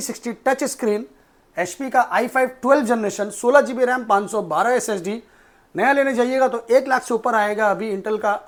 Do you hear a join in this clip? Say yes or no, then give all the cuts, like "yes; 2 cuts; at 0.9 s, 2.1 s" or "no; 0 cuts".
no; 0 cuts